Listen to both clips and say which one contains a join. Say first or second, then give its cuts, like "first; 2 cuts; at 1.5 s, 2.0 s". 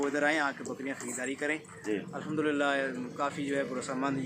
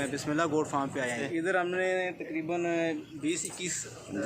second; 1 cut; at 1.2 s